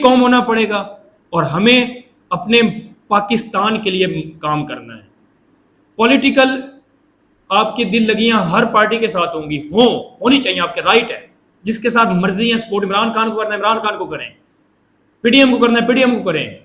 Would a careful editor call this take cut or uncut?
uncut